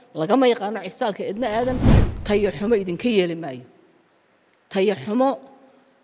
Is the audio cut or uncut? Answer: cut